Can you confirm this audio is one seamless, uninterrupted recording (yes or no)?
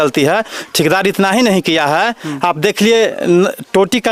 yes